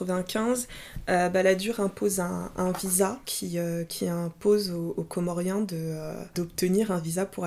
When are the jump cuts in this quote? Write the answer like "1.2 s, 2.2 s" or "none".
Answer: 3.3 s, 6.3 s